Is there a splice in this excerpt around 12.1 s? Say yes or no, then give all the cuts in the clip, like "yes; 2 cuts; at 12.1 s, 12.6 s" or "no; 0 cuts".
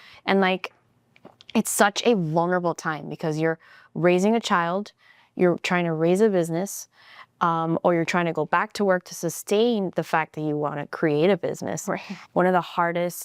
yes; 1 cut; at 12.1 s